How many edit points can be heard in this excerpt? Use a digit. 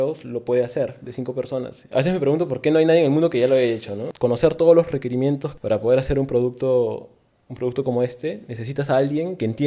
3